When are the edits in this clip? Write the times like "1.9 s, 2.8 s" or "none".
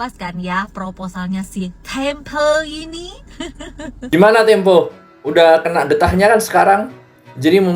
3.8 s